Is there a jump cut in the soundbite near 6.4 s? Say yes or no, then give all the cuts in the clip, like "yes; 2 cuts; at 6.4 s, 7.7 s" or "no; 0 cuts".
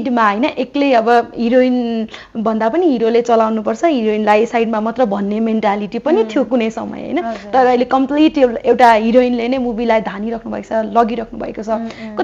no; 0 cuts